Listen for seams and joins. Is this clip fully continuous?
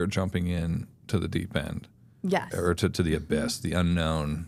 yes; 0 cuts

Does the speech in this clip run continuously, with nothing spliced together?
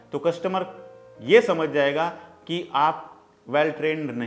yes; 0 cuts

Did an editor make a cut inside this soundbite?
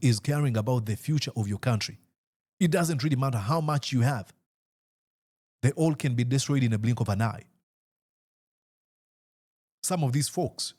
no; 0 cuts

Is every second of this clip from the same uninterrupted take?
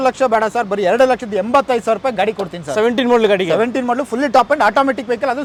yes; 0 cuts

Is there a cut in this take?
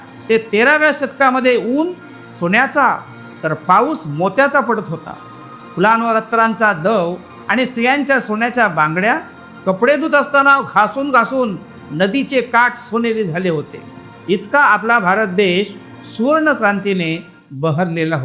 no; 0 cuts

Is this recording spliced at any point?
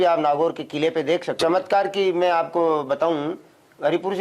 yes; 1 cut; at 1.3 s

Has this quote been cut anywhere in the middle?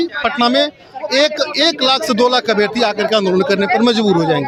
no; 0 cuts

